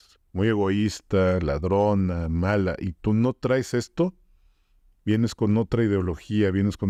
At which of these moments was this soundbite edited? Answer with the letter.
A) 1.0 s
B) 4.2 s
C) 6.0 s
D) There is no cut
D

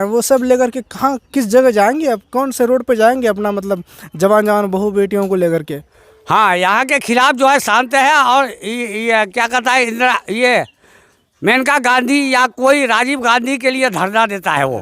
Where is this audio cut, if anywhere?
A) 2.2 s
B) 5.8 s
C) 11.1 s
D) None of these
B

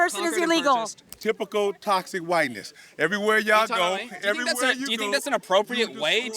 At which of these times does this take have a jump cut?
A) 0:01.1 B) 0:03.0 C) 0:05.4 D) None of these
A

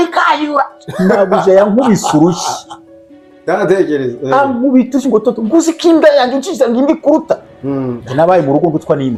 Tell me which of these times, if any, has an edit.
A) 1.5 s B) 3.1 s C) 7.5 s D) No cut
D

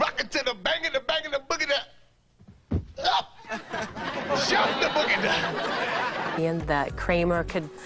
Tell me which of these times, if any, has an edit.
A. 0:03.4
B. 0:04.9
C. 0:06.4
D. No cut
D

